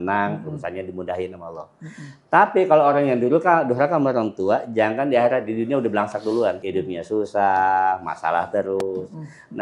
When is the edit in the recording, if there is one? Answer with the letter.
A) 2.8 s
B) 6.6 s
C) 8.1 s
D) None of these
B